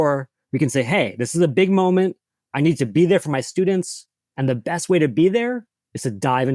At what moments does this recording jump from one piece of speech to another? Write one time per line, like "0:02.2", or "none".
none